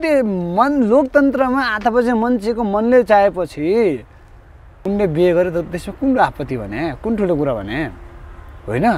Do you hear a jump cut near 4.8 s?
yes; 1 cut; at 4.8 s

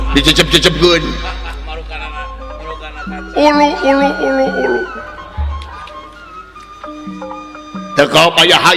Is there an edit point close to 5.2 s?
no; 1 cut; at 7.5 s

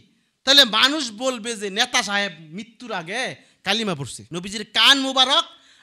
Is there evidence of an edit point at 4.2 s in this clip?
yes; 1 cut; at 4.2 s

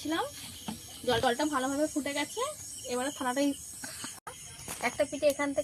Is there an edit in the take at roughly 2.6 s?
no; 1 cut; at 4.3 s

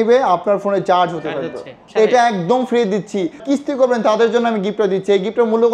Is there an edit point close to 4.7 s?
no; 2 cuts; at 1.8 s, 3.4 s

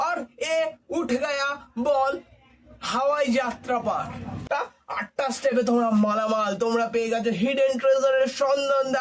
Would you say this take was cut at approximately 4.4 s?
yes; 1 cut; at 4.4 s

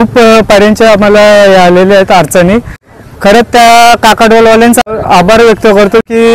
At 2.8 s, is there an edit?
yes; 2 cuts; at 2.8 s, 4.8 s

